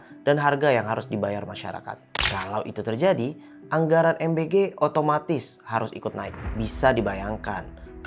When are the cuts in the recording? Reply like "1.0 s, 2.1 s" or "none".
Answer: 2.3 s

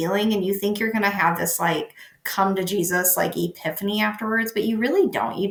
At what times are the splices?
none

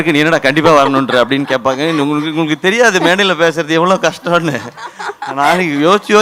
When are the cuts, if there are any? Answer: none

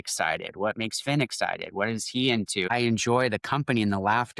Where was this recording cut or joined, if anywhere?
2.7 s

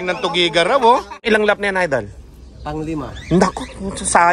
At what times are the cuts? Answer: 1.2 s

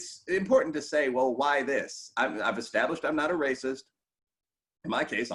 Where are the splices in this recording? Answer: none

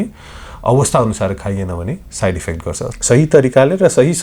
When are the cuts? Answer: 2.9 s

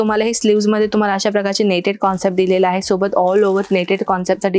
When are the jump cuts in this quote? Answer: none

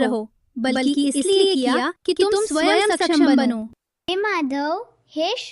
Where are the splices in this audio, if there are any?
4.1 s

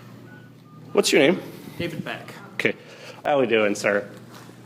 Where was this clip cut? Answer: 3.2 s

